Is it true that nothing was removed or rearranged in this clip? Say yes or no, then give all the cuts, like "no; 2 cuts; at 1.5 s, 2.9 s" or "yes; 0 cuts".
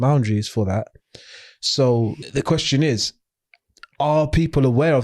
no; 1 cut; at 2.2 s